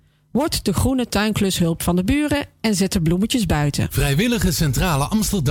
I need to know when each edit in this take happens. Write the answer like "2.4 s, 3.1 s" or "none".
3.9 s